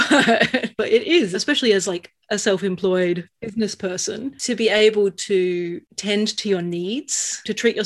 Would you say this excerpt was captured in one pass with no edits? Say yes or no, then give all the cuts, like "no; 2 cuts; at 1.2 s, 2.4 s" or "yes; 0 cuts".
no; 2 cuts; at 3.4 s, 5.9 s